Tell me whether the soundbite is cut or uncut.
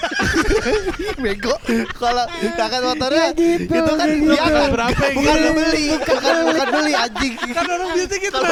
uncut